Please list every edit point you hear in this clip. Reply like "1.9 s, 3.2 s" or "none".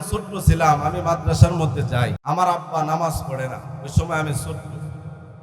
2.2 s